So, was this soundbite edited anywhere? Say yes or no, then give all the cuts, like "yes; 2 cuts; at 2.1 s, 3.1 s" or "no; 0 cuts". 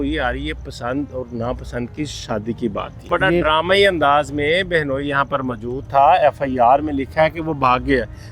yes; 1 cut; at 3.1 s